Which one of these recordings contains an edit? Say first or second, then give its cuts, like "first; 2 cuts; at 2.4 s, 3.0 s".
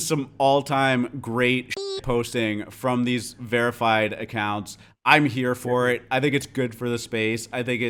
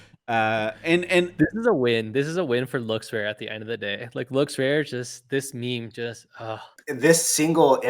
second; 1 cut; at 6.7 s